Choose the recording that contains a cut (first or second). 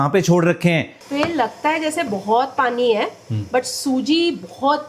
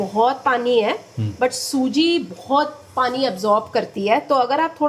first